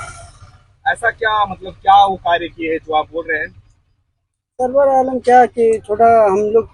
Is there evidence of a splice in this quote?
no; 0 cuts

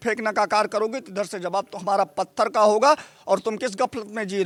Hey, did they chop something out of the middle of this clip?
no; 0 cuts

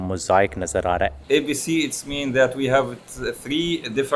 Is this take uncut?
no; 1 cut; at 1.2 s

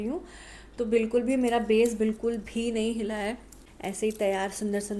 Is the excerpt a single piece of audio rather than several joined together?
no; 1 cut; at 3.7 s

